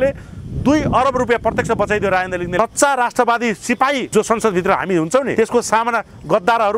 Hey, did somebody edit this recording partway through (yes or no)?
yes